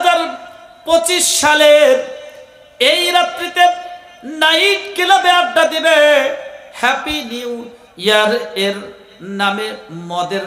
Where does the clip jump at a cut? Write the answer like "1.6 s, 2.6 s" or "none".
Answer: none